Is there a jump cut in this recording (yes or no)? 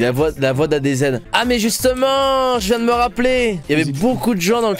no